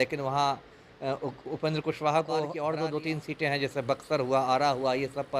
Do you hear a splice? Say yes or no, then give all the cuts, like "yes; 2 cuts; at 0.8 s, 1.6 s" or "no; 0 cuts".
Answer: yes; 1 cut; at 2.5 s